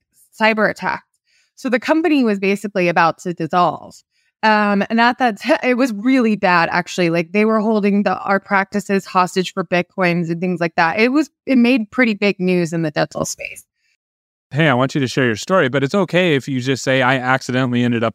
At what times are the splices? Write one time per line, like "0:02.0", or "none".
0:14.2